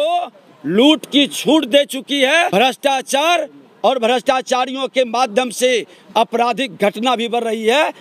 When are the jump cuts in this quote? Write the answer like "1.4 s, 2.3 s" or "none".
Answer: none